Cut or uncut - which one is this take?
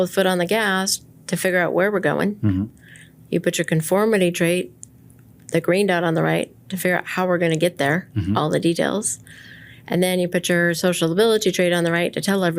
uncut